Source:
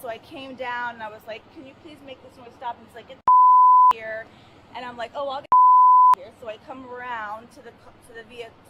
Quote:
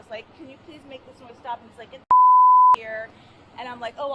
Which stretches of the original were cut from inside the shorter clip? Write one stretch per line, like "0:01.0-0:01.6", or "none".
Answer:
none